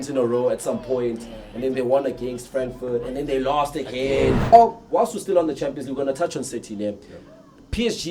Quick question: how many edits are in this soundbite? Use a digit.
1